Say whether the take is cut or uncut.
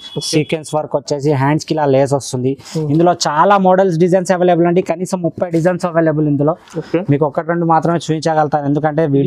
uncut